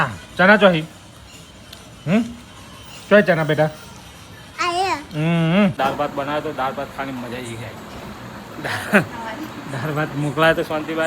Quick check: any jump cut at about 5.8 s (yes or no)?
yes